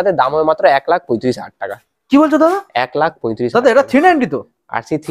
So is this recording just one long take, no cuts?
yes; 0 cuts

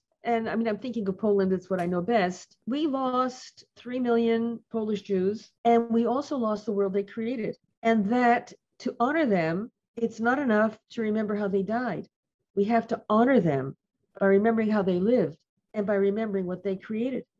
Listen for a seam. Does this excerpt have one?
yes; 1 cut; at 2.5 s

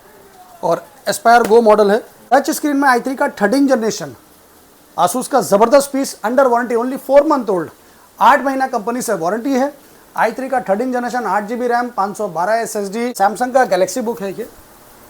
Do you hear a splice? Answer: yes; 2 cuts; at 2.2 s, 13.1 s

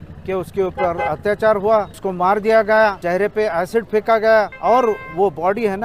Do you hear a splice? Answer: yes; 3 cuts; at 2.0 s, 3.0 s, 4.5 s

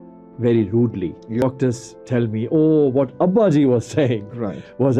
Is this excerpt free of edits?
no; 1 cut; at 1.4 s

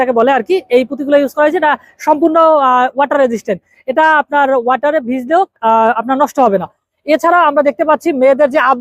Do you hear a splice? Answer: no; 0 cuts

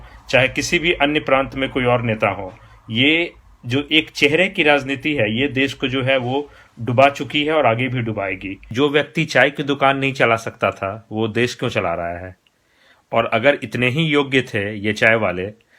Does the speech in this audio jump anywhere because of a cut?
yes; 1 cut; at 8.6 s

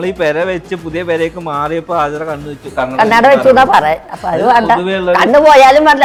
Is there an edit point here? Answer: no; 0 cuts

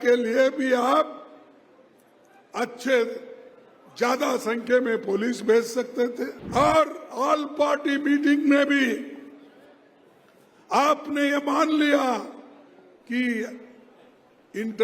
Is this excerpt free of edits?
no; 1 cut; at 6.4 s

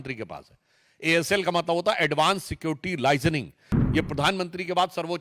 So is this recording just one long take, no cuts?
no; 1 cut; at 3.7 s

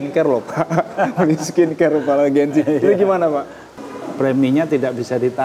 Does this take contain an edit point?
yes; 1 cut; at 3.7 s

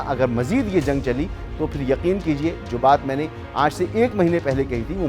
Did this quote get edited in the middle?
no; 0 cuts

